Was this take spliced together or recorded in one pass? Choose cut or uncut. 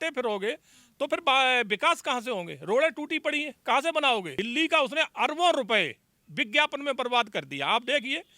cut